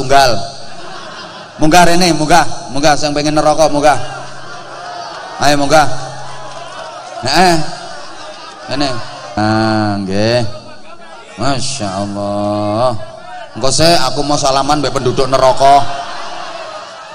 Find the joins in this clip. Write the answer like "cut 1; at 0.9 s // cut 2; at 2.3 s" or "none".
cut 1; at 9.4 s

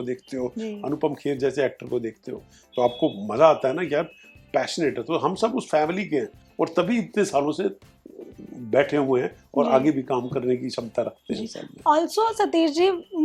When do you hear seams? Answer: none

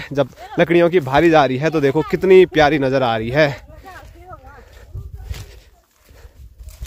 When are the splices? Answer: none

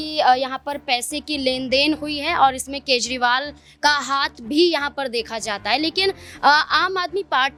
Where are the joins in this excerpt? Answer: none

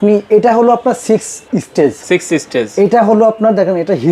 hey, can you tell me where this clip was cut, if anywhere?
none

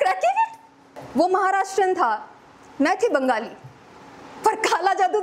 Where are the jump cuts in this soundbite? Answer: cut 1; at 1.0 s

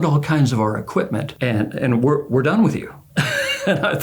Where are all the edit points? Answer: cut 1; at 1.3 s

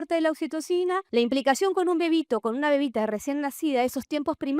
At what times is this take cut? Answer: cut 1; at 1.1 s

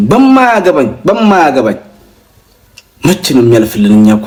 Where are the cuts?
none

